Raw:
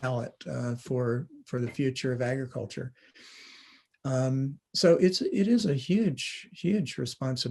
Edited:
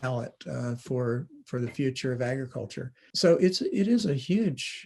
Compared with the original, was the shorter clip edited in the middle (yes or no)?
yes